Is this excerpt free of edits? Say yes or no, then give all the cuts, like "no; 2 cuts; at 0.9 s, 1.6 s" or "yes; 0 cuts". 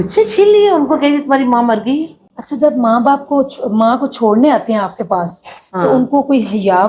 yes; 0 cuts